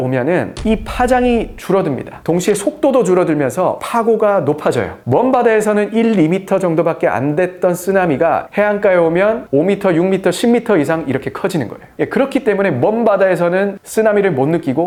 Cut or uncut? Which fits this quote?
uncut